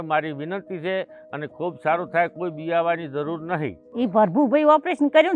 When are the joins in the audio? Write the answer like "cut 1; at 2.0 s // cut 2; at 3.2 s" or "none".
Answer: cut 1; at 3.8 s